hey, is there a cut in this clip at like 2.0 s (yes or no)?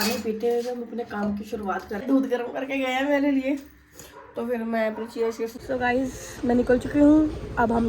yes